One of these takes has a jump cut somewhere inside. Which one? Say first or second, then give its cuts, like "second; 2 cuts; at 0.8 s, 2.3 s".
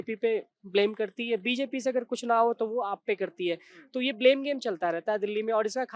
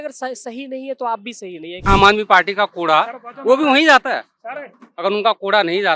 second; 1 cut; at 1.8 s